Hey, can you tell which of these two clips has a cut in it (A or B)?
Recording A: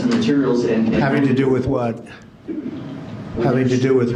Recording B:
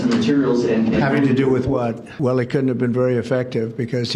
B